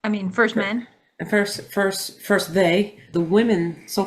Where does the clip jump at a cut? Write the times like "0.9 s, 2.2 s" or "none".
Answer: 3.1 s